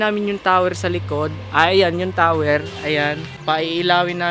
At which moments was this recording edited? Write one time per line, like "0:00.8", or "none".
0:03.3